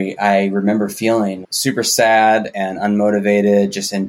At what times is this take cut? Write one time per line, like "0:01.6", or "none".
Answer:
0:01.4